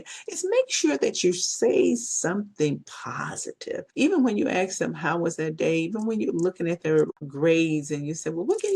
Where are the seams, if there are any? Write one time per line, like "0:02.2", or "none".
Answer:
0:03.9
0:07.2